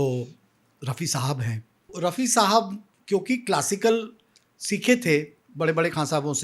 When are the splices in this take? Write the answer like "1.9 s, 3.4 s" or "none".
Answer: 1.9 s